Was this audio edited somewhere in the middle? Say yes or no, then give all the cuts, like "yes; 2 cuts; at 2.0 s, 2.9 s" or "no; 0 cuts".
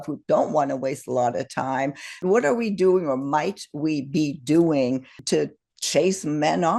yes; 2 cuts; at 2.2 s, 5.2 s